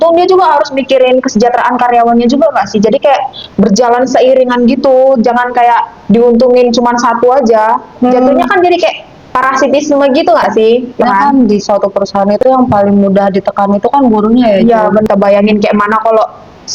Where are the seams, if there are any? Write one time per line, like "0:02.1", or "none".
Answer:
0:11.0
0:15.1